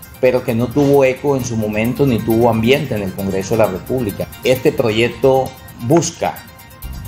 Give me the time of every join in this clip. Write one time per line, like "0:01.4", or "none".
0:04.2